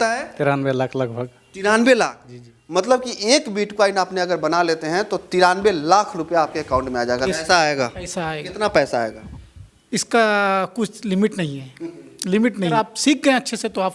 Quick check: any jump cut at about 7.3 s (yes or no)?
yes